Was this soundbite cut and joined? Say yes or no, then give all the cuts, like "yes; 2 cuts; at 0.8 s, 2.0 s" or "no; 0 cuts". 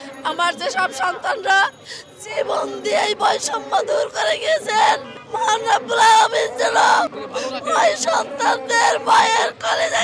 yes; 2 cuts; at 5.2 s, 7.2 s